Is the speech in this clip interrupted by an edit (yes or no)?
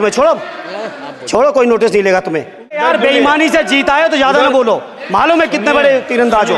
yes